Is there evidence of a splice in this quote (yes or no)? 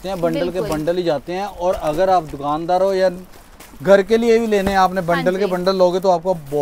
no